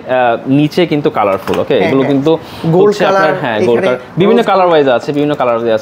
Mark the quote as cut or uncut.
uncut